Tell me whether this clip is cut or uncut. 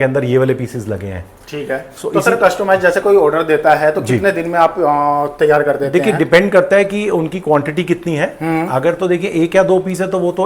uncut